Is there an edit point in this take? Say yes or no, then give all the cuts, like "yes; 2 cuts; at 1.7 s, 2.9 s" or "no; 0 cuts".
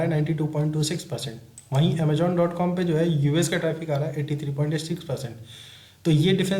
no; 0 cuts